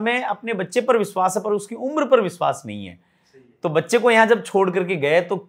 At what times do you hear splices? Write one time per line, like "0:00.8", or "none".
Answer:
none